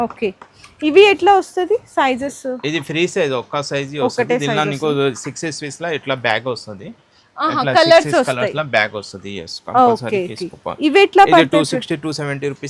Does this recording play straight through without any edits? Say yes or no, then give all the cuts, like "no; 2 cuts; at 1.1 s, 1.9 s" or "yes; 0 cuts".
yes; 0 cuts